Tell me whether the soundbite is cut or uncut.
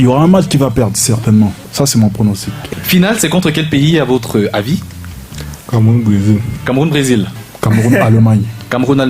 cut